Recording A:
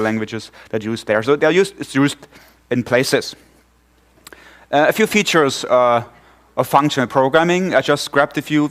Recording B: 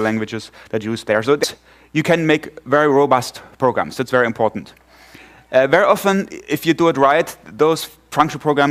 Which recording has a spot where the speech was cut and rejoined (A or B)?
A